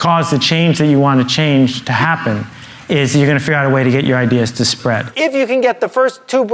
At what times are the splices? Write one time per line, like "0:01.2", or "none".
0:05.1